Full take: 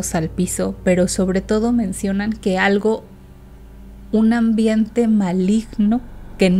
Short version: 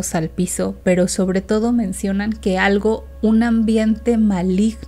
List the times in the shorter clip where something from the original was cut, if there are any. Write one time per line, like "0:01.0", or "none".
0:03.1